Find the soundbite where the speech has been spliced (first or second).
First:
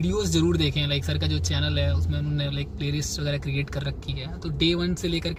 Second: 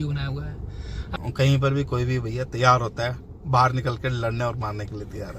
second